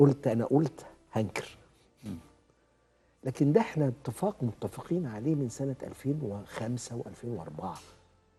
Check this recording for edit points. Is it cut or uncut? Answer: uncut